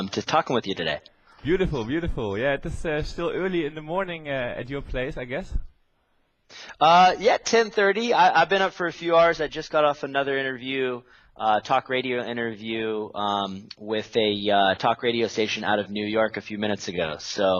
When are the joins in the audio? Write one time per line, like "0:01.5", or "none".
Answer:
0:09.2

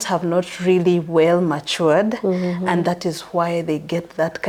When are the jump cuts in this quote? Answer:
none

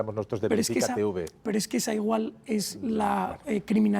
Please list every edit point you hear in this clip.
none

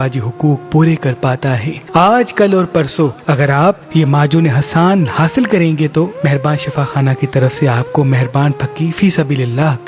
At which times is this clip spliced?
0:01.7

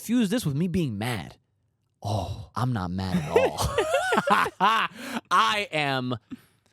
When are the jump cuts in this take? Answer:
0:02.4

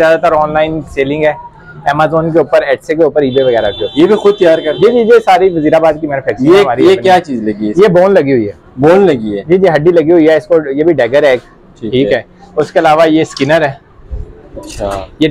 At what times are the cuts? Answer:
none

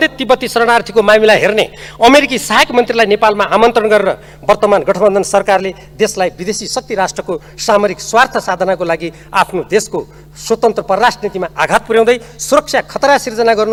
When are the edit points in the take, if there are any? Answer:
none

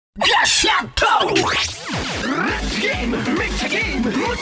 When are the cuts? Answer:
0:01.6

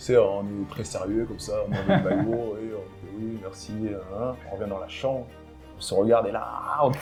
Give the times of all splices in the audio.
none

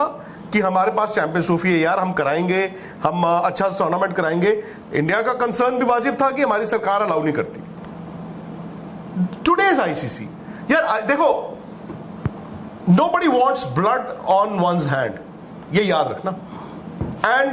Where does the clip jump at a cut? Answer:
0:07.6

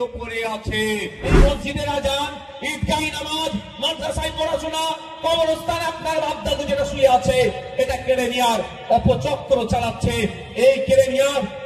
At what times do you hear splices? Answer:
0:01.3

